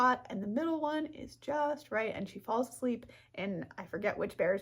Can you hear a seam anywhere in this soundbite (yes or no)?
yes